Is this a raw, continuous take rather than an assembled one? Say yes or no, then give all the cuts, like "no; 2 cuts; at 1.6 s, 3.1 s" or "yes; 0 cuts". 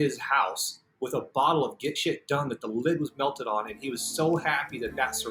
yes; 0 cuts